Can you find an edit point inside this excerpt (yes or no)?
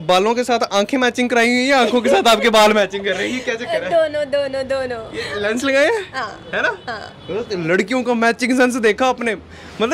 no